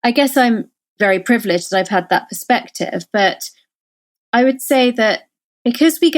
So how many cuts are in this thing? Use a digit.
1